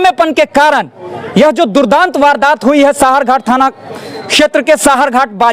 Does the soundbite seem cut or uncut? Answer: uncut